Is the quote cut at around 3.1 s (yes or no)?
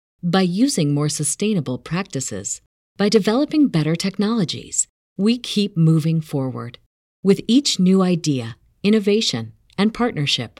no